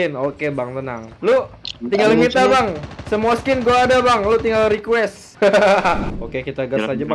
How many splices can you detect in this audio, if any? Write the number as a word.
two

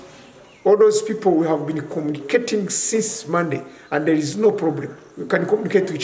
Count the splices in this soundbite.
zero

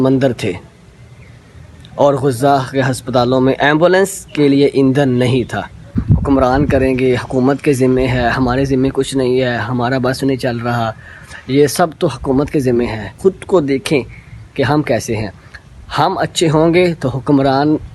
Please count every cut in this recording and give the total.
two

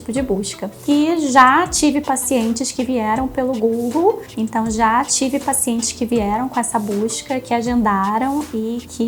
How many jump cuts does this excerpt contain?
two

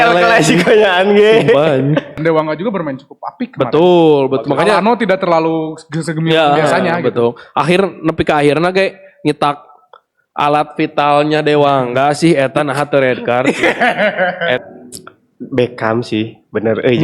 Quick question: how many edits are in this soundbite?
two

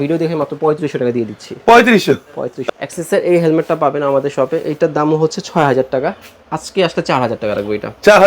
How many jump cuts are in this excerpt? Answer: one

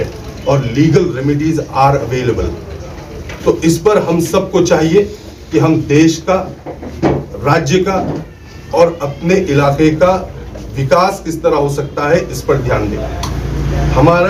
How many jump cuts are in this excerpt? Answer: zero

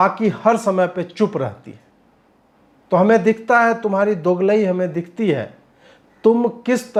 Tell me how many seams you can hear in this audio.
zero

